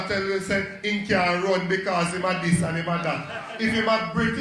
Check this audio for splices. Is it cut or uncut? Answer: uncut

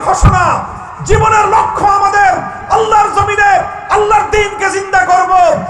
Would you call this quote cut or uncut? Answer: uncut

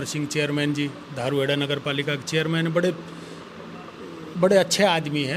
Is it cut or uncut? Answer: uncut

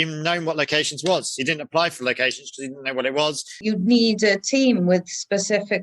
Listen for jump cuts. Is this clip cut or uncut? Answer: cut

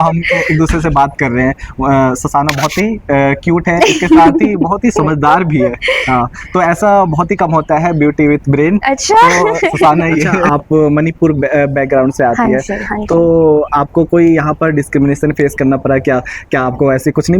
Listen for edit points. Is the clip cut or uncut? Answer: cut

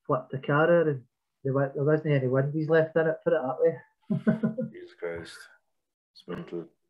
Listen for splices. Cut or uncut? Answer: uncut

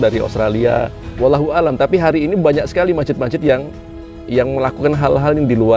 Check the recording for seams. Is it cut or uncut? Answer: cut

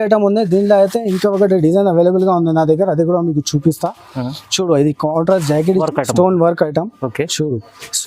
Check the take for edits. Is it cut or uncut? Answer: cut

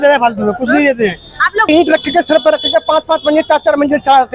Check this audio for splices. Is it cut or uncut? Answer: cut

